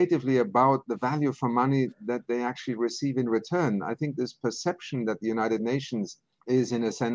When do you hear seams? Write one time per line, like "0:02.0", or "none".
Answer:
none